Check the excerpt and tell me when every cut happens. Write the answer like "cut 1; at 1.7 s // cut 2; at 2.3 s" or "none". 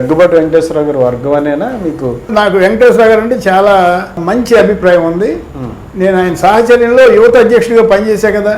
cut 1; at 2.3 s